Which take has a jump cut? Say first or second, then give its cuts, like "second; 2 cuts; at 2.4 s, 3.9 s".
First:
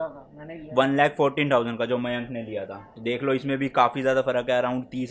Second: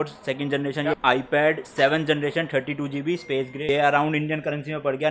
second; 2 cuts; at 1.0 s, 3.6 s